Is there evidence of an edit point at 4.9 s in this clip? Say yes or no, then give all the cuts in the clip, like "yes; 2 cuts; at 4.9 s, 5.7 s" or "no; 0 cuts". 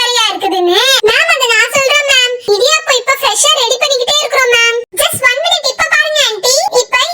yes; 2 cuts; at 1.0 s, 4.9 s